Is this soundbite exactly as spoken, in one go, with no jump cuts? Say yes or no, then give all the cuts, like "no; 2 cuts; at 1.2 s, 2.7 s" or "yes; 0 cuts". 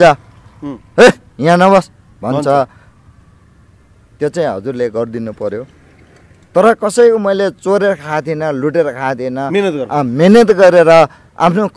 yes; 0 cuts